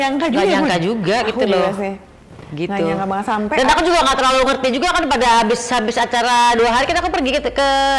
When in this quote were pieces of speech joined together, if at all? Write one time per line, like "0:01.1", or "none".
none